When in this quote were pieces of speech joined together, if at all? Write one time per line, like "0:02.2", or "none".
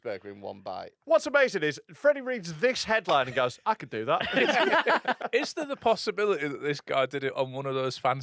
0:00.9
0:05.2